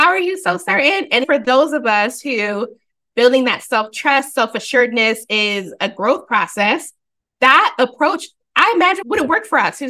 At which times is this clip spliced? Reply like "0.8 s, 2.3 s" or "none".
1.2 s, 9.0 s